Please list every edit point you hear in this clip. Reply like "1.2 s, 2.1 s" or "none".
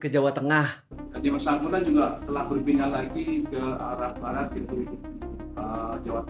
none

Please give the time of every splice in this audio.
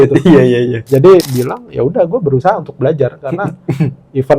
1.3 s

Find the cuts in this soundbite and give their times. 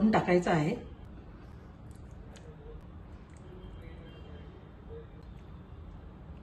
none

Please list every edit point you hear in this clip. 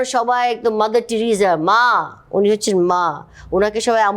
none

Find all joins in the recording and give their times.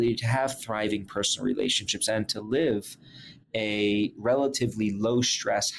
4.2 s

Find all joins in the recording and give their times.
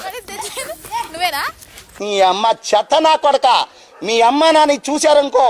none

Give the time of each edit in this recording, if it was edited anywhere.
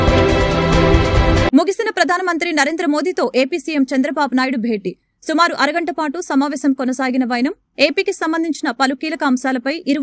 1.5 s

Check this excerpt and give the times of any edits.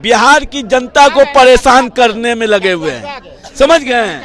none

